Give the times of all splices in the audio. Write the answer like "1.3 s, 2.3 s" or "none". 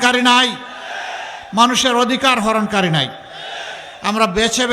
none